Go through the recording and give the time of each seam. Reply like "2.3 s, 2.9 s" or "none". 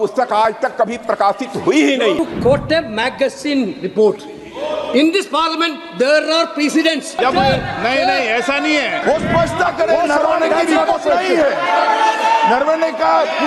2.2 s, 7.2 s, 9.0 s

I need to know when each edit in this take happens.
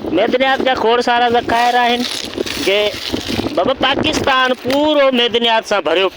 none

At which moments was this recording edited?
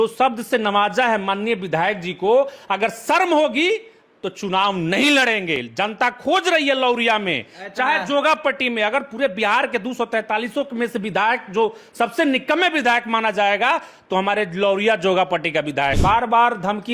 16.0 s

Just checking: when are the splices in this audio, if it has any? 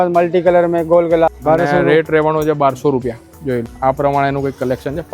1.4 s, 3.7 s

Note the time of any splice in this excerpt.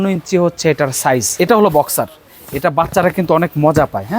1.3 s

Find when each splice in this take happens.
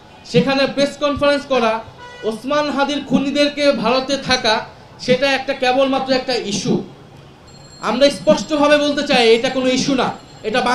none

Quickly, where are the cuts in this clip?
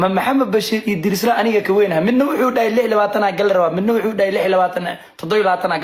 none

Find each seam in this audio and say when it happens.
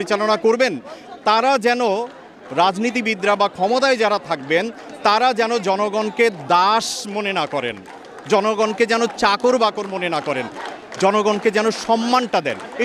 none

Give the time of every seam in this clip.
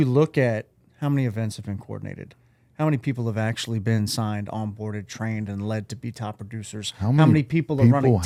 none

